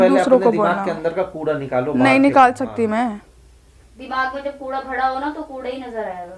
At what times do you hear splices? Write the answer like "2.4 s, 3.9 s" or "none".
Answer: none

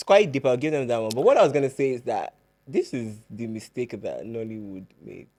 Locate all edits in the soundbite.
none

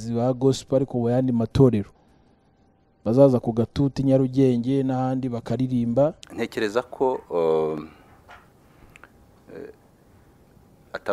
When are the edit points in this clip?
6.2 s

